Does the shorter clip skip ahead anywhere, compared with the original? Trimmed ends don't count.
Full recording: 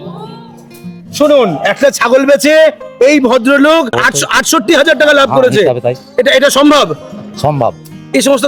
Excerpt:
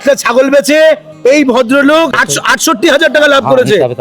yes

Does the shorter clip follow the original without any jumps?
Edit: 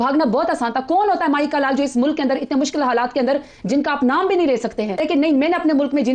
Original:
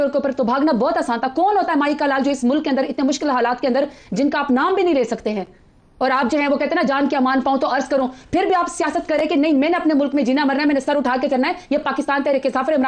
no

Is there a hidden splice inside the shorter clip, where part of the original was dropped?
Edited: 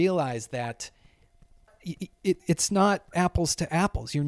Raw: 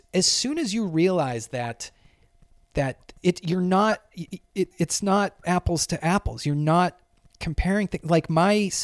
yes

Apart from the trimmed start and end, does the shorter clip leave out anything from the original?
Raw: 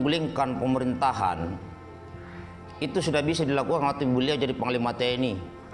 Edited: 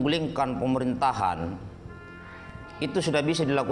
no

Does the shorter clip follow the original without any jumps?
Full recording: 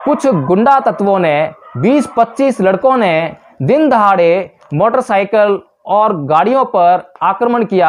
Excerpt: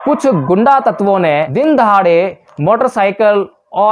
no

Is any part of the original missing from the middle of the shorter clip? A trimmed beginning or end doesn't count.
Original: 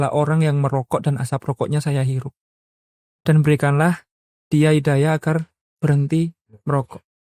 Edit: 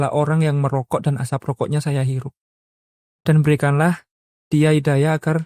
no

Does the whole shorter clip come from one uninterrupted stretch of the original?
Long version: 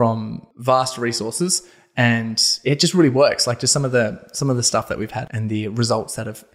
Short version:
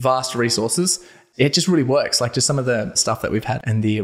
no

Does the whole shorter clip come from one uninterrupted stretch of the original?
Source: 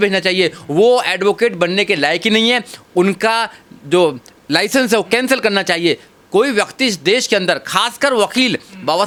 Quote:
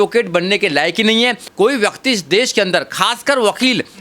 no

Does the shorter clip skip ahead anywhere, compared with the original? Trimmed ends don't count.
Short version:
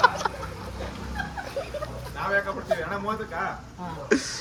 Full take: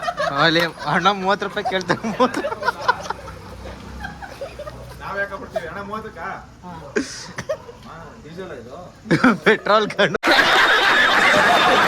no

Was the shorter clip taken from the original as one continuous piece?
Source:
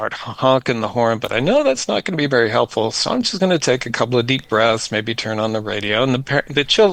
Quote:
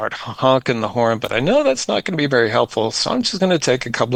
yes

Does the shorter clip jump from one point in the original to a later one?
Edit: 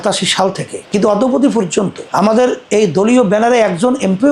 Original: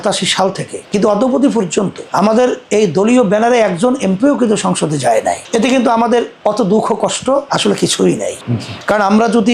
no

